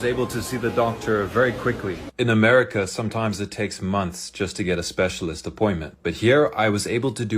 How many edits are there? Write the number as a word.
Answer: two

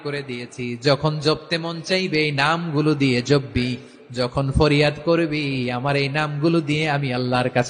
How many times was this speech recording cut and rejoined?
zero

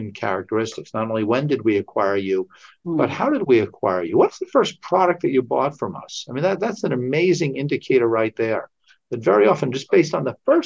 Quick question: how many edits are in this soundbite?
zero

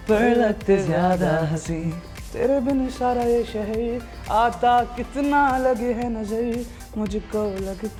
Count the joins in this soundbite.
zero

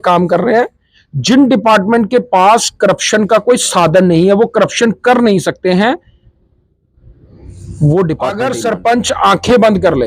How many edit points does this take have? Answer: one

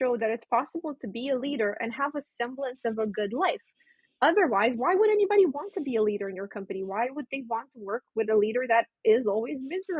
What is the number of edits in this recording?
zero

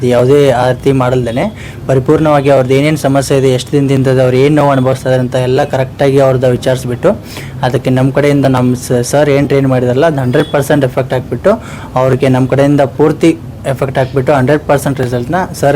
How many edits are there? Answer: zero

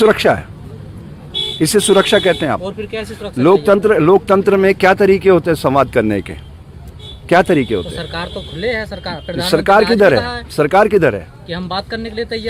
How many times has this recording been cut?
zero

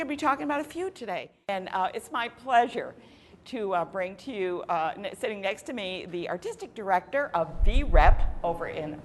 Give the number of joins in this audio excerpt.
one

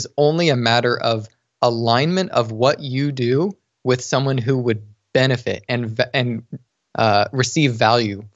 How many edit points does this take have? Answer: zero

